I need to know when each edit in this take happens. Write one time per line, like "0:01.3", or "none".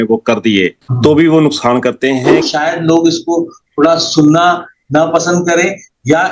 0:02.4